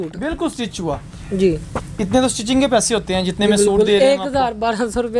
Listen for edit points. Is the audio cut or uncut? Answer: uncut